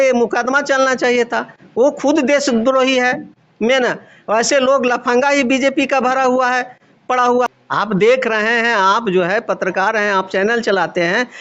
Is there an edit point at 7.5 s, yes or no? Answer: yes